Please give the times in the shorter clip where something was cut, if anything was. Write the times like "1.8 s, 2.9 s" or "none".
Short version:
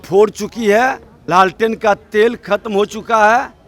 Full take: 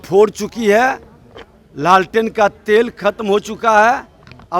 1.1 s